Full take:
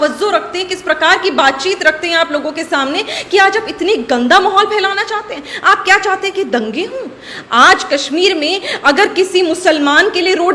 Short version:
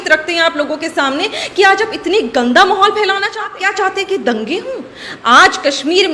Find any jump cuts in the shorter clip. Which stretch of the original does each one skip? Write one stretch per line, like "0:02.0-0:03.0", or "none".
0:05.4-0:05.9